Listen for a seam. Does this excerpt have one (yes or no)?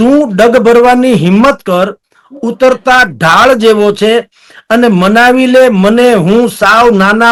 no